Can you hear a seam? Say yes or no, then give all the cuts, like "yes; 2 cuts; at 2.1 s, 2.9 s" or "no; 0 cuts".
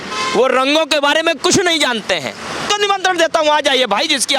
yes; 1 cut; at 2.7 s